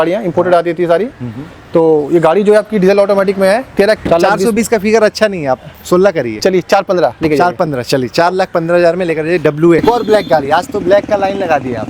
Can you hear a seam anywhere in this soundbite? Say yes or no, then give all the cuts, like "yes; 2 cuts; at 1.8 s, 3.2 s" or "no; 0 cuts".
yes; 2 cuts; at 4.0 s, 9.8 s